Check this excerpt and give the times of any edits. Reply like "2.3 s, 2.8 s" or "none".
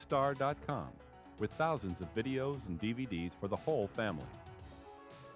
4.2 s